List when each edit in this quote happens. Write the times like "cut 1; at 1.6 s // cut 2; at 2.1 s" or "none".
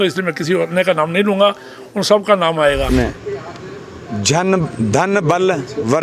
cut 1; at 2.9 s